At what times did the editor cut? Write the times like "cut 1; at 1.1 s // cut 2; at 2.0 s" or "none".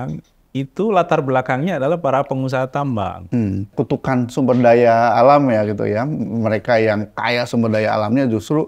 cut 1; at 3.7 s